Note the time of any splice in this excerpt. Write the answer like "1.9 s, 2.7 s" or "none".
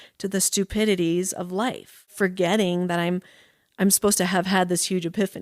2.1 s